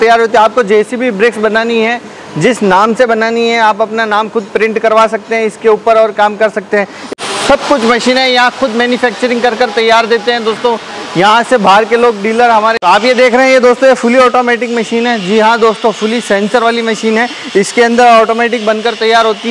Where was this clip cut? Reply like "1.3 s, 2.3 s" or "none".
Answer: 7.0 s, 12.8 s